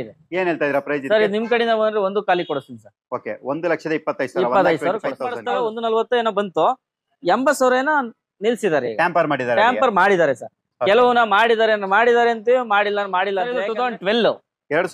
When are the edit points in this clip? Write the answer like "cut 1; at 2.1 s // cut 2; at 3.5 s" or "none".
cut 1; at 5.3 s // cut 2; at 13.6 s